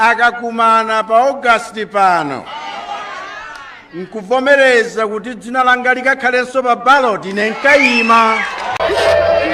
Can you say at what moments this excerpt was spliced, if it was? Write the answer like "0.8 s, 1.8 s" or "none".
8.6 s